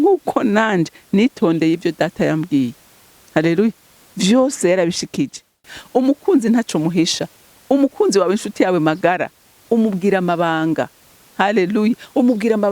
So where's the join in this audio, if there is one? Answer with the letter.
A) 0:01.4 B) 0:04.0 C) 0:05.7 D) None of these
C